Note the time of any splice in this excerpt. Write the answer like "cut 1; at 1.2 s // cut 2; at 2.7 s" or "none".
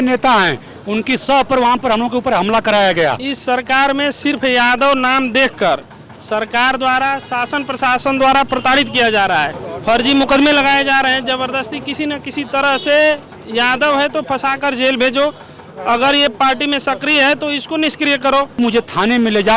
cut 1; at 3.3 s // cut 2; at 18.6 s